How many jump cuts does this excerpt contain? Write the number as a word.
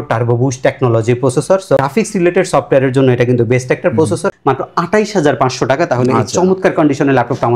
two